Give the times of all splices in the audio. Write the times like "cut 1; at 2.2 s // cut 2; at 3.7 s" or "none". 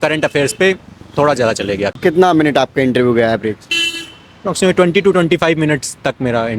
cut 1; at 2.0 s